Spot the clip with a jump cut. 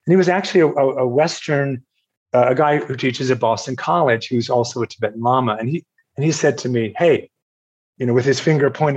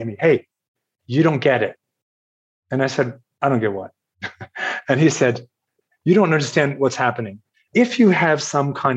second; 2 cuts; at 1.0 s, 7.7 s

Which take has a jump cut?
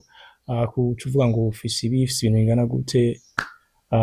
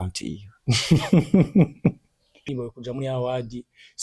second; 1 cut; at 2.4 s

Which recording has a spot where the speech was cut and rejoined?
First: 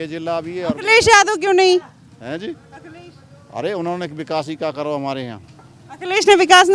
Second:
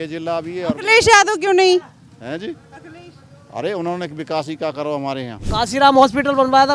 second; 1 cut; at 5.4 s

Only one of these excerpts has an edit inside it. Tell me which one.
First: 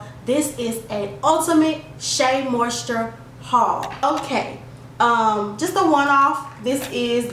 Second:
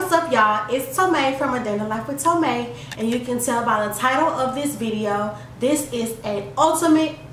first; 1 cut; at 4.0 s

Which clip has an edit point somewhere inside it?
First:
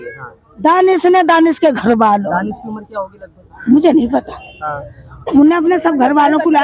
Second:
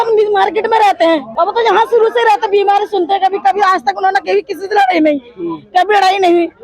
second; 1 cut; at 1.3 s

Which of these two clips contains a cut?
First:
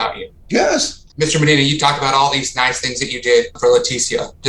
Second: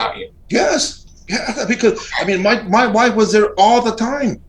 first; 1 cut; at 1.0 s

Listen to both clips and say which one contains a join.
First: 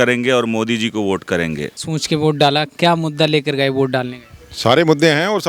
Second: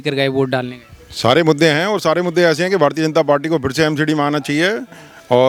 first; 1 cut; at 1.9 s

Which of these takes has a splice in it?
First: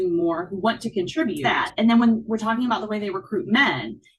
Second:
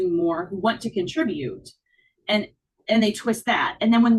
first; 1 cut; at 1.4 s

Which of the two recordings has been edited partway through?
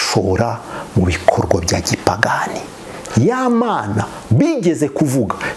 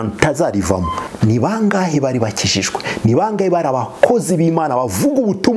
second; 1 cut; at 1.0 s

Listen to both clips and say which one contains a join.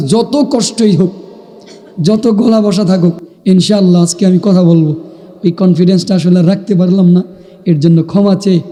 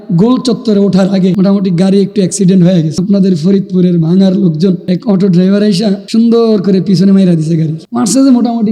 second; 5 cuts; at 1.3 s, 3.0 s, 4.8 s, 6.0 s, 7.8 s

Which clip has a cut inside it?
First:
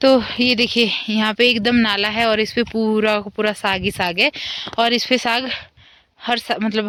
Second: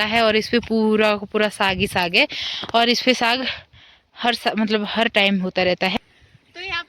second; 1 cut; at 6.0 s

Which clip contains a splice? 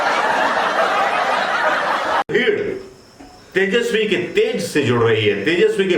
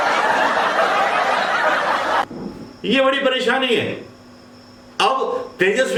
first; 1 cut; at 2.3 s

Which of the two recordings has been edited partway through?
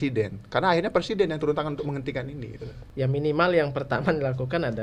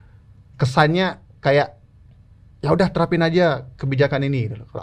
first; 1 cut; at 2.8 s

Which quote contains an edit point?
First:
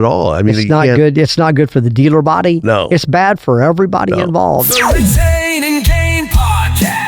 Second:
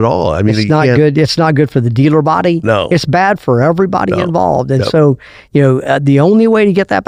first; 1 cut; at 4.7 s

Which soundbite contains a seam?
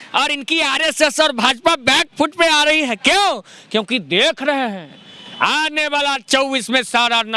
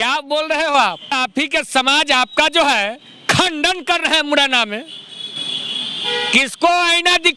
second; 1 cut; at 1.1 s

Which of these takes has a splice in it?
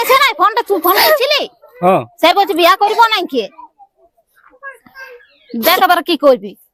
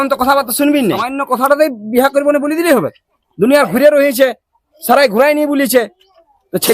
second; 1 cut; at 1.1 s

